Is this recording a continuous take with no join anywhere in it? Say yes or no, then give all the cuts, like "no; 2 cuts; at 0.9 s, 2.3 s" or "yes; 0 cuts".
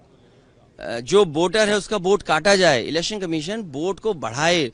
yes; 0 cuts